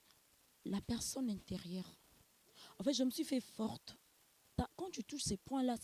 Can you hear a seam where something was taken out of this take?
yes; 1 cut; at 4.5 s

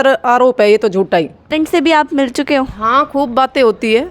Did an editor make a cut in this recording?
yes; 1 cut; at 1.5 s

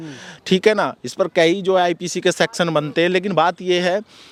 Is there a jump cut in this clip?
no; 0 cuts

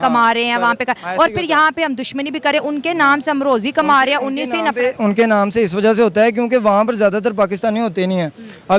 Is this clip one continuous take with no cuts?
yes; 0 cuts

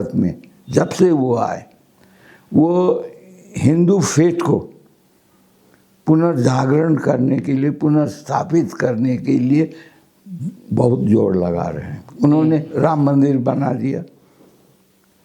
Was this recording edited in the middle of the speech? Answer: no; 0 cuts

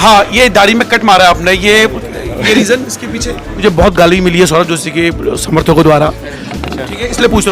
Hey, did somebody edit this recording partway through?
yes; 1 cut; at 3.6 s

